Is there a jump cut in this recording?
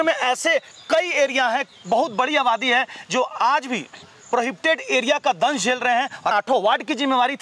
yes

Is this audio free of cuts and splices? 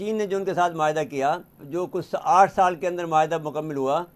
no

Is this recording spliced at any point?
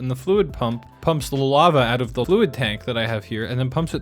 yes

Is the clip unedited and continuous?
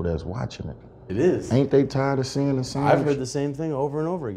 yes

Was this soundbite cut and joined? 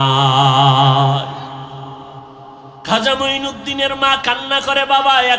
yes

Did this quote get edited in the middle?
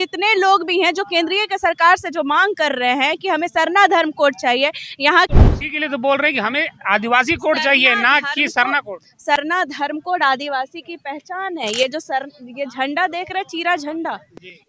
yes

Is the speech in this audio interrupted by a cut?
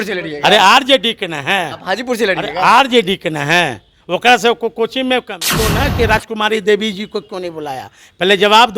yes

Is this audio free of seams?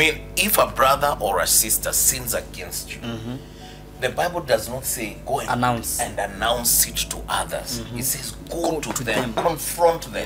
yes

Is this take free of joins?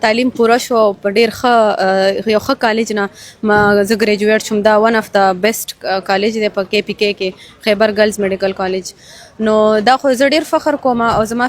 yes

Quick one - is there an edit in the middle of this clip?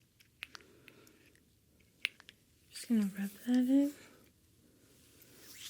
yes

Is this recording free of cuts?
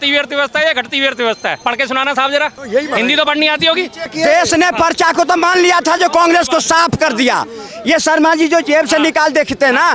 no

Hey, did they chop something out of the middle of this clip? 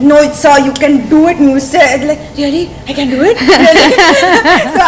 no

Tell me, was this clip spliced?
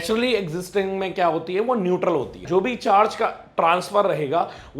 yes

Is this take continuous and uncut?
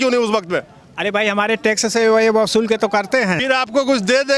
no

